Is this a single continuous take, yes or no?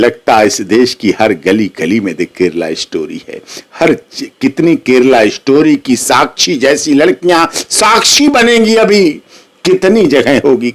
yes